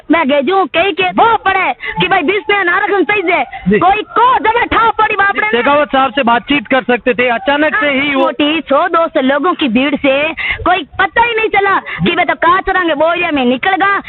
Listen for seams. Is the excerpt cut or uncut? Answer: cut